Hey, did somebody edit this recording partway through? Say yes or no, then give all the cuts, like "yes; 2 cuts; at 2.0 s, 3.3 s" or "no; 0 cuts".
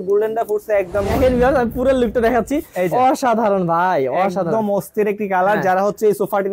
yes; 1 cut; at 1.1 s